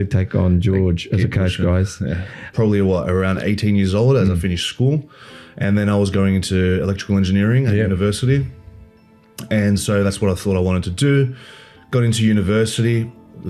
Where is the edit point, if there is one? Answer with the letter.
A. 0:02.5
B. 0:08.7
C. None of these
A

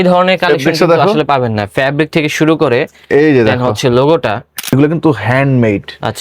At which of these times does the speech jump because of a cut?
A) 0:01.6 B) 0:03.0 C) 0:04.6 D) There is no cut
C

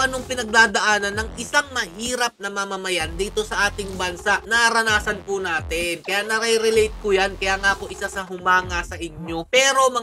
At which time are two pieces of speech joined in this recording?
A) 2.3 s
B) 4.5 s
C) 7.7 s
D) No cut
B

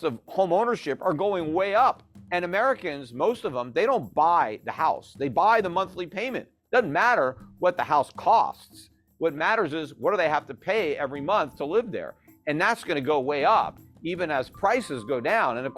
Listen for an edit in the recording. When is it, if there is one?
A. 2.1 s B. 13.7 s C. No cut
A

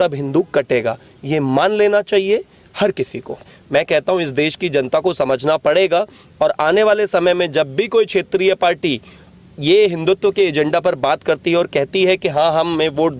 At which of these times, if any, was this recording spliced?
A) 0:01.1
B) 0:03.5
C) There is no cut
B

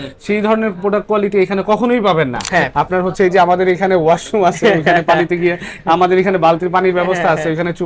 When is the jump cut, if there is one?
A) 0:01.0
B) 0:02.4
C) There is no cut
B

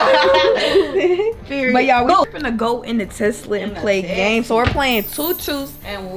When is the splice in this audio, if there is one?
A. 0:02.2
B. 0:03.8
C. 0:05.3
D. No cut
A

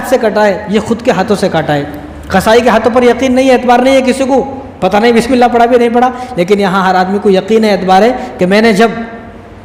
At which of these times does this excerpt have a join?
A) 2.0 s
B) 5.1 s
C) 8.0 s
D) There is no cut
D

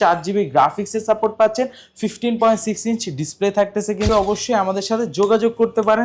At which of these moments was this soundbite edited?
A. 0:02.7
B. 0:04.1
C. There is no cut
B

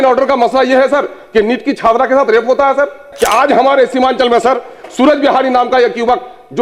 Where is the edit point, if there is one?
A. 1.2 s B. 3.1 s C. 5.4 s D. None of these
B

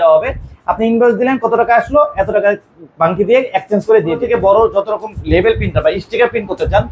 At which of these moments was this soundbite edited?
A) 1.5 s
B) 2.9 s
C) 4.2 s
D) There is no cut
C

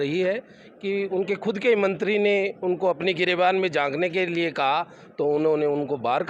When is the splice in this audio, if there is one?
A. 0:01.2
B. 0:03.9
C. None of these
C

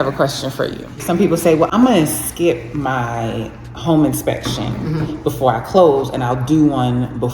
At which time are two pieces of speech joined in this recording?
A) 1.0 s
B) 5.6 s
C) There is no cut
A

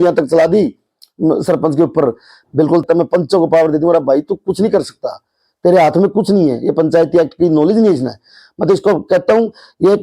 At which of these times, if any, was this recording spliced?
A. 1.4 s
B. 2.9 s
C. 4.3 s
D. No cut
B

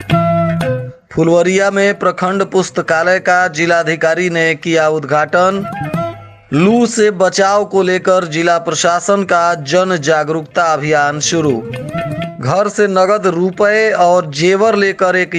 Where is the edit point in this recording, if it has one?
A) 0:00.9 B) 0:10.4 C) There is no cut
A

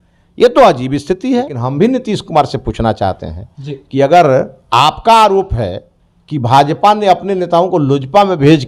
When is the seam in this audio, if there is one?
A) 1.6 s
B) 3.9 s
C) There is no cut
A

